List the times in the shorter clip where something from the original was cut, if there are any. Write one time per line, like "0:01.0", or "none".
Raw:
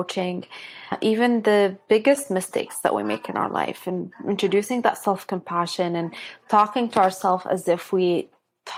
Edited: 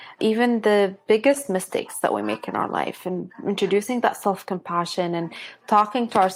none

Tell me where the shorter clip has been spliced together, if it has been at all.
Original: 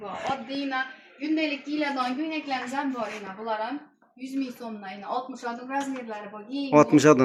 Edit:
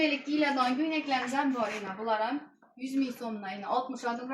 none

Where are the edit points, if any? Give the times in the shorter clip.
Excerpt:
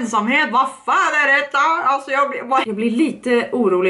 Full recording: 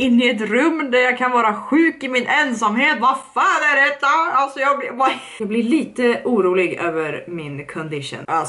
0:02.7

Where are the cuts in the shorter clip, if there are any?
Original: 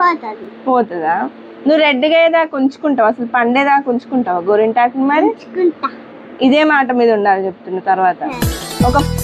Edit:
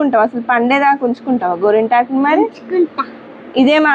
none

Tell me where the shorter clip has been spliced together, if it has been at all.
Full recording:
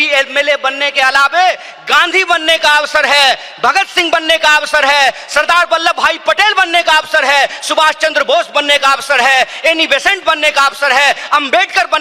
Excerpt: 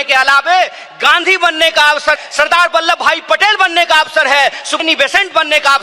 0:02.2
0:04.8

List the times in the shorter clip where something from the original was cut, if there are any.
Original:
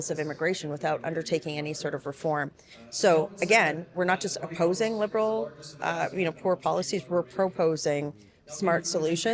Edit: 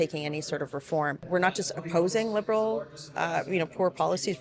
0:01.2

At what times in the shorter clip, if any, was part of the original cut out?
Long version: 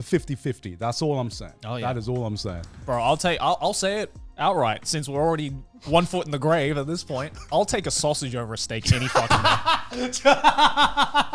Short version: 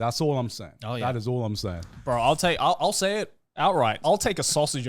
0:04.0

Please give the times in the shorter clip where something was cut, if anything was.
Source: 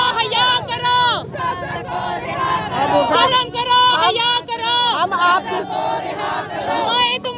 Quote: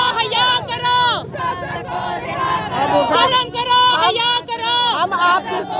none

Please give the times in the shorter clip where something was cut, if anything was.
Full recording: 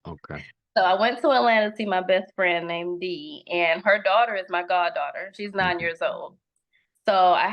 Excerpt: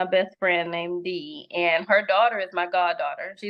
none

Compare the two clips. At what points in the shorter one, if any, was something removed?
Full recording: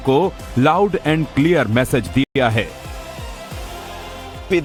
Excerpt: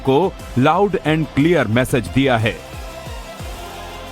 0:02.2

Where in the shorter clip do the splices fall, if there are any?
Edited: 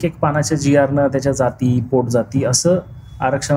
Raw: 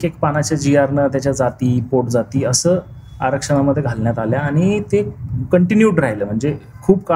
none

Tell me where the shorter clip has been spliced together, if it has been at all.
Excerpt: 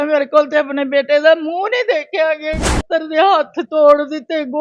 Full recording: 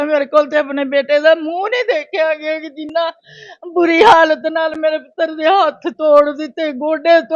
0:02.8

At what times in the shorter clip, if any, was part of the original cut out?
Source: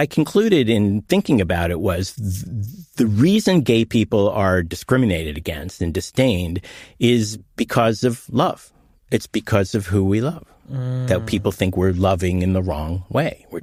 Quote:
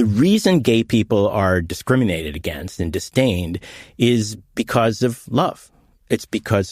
none

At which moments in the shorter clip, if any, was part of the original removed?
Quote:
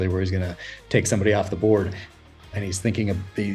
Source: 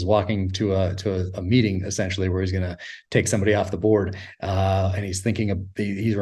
0:02.4

